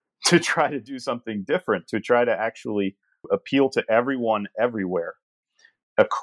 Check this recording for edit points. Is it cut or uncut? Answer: cut